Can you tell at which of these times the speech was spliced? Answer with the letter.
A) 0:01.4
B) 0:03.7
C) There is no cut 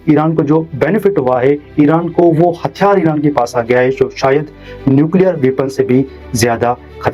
C